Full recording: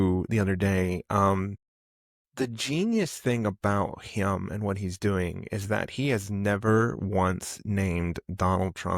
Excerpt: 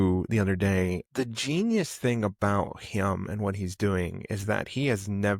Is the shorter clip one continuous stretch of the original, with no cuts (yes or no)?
no